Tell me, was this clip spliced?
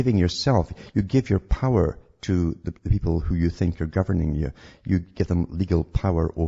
yes; 1 cut; at 1.1 s

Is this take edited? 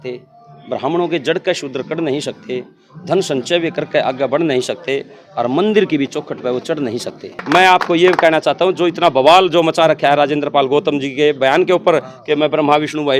yes; 1 cut; at 7.4 s

